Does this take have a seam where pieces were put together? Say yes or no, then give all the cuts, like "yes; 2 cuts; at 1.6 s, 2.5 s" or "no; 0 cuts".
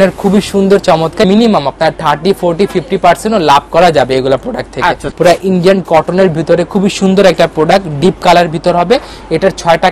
yes; 2 cuts; at 1.2 s, 5.1 s